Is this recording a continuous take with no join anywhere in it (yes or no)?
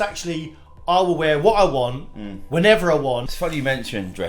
no